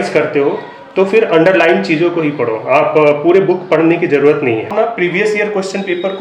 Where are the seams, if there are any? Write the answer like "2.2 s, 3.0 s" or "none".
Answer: 4.7 s